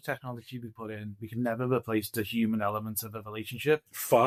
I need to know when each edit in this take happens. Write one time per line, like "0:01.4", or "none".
none